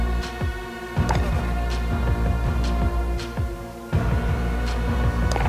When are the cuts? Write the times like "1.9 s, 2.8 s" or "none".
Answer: none